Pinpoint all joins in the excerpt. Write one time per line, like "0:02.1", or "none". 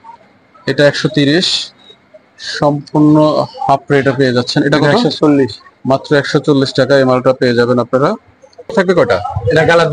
0:08.7

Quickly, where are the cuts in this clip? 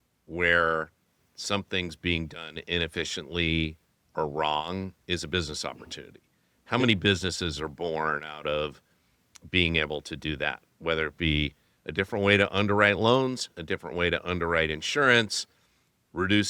none

